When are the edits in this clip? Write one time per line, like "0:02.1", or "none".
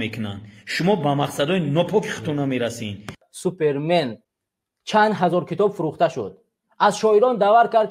0:03.3
0:04.2